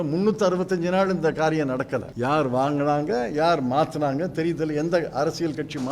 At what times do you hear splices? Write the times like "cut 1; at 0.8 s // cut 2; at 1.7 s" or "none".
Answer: cut 1; at 2.1 s